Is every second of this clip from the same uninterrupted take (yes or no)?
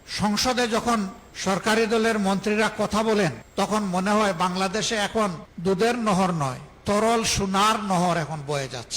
no